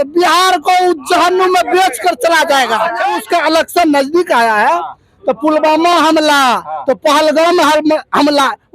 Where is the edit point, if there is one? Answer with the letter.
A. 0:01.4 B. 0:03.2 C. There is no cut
B